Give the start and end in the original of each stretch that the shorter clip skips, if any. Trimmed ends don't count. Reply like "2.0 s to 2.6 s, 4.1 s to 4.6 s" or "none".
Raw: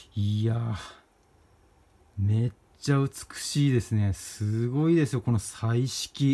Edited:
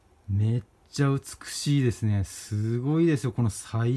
none